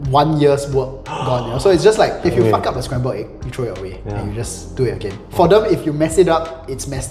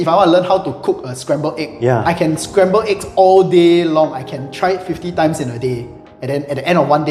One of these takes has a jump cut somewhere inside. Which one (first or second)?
first